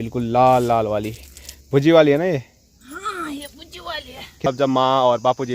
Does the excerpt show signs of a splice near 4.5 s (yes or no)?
yes